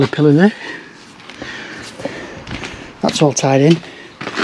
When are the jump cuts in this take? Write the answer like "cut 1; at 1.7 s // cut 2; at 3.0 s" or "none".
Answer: none